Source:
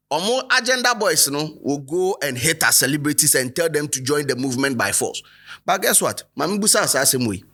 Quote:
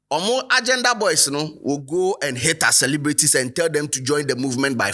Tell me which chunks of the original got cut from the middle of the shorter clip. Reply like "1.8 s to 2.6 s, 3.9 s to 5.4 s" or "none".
none